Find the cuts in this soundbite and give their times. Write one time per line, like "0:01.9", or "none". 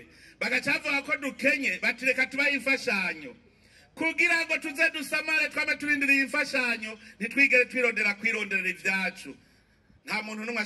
none

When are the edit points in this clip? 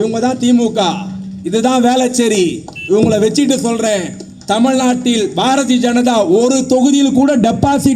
none

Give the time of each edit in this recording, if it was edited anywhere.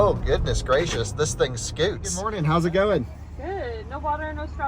0:02.3

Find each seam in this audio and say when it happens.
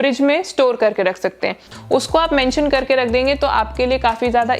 0:01.6

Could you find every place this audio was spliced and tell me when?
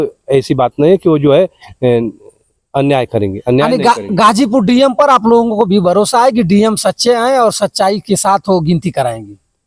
none

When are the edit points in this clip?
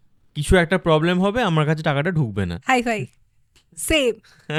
none

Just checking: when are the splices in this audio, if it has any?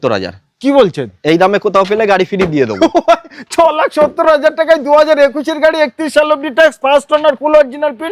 none

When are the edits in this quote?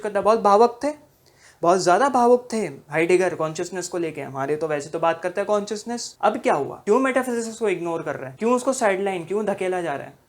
0:06.0
0:06.8
0:08.2

